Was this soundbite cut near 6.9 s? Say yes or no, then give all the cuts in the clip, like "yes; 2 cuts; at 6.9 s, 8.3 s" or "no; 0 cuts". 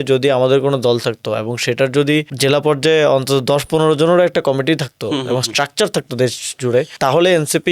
yes; 2 cuts; at 2.3 s, 6.9 s